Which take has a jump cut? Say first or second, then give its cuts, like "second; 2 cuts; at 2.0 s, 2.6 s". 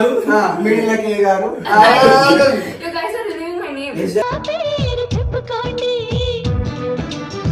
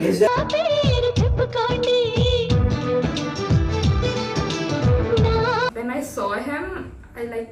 second; 1 cut; at 5.7 s